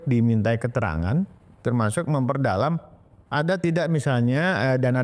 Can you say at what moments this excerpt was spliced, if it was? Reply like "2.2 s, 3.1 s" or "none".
none

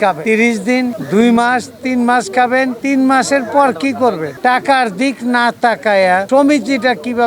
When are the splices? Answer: 4.4 s, 6.3 s

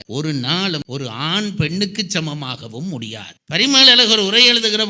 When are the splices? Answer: 3.5 s

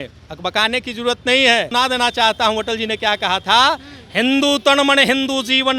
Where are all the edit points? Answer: 1.7 s

